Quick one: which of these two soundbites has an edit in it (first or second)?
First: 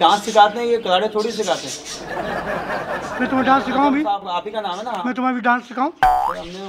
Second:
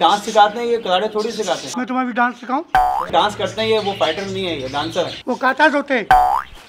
second